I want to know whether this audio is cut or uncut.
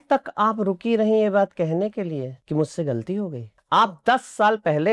cut